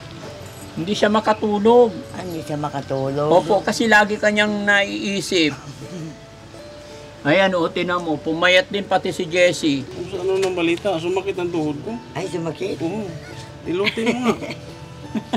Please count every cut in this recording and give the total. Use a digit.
1